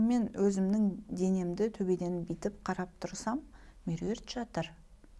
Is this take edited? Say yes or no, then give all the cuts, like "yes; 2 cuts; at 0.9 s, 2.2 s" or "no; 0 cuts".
no; 0 cuts